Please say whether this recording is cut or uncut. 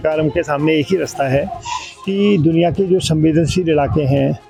uncut